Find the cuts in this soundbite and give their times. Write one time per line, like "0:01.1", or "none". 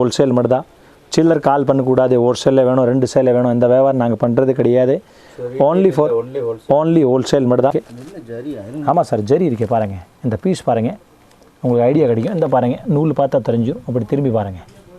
0:07.9